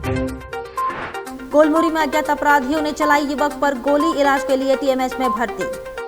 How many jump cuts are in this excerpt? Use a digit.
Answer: 1